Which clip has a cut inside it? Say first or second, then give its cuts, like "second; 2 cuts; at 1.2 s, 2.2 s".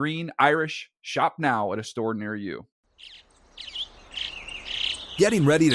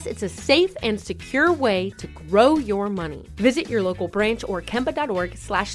first; 1 cut; at 2.7 s